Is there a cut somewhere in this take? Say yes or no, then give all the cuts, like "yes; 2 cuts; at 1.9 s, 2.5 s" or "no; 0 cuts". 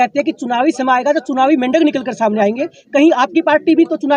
no; 0 cuts